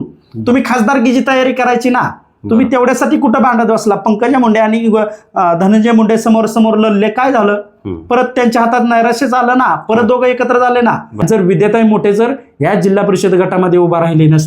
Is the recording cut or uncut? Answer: cut